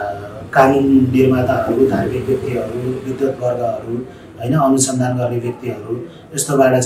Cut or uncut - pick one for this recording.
uncut